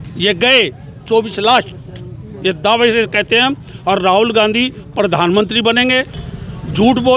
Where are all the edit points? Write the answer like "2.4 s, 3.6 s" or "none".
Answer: 6.1 s